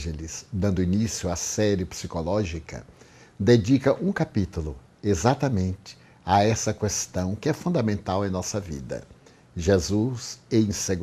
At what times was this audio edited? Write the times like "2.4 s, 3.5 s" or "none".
none